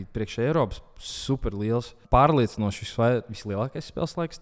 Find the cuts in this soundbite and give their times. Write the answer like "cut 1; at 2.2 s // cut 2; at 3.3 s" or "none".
cut 1; at 2.0 s